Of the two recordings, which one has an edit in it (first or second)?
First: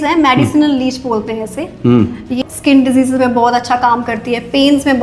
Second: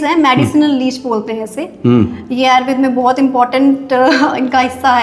first